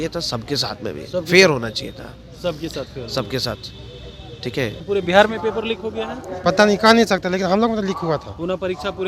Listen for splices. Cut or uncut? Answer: cut